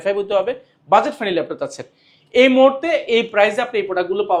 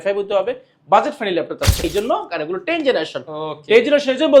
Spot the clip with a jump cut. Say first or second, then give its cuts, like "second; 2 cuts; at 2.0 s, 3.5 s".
second; 1 cut; at 1.9 s